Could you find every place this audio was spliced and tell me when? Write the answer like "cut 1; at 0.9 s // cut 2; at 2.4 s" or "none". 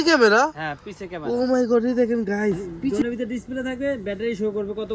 cut 1; at 2.9 s